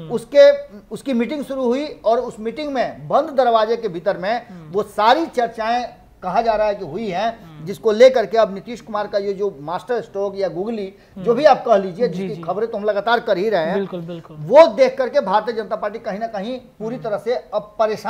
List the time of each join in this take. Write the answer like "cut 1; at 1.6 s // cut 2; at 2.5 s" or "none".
none